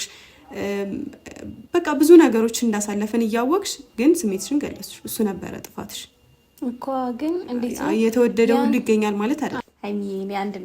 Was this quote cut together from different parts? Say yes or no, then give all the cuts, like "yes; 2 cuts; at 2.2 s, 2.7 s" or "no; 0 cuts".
yes; 1 cut; at 9.6 s